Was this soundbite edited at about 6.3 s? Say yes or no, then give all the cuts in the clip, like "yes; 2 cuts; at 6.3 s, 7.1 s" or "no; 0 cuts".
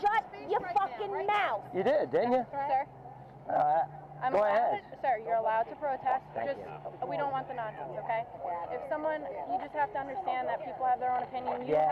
no; 1 cut; at 1.7 s